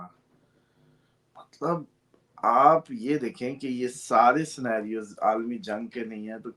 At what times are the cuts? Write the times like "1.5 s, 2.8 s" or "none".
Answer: none